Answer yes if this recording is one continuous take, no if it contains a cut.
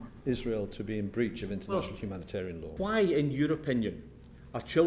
no